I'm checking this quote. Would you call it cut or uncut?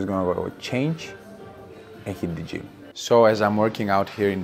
cut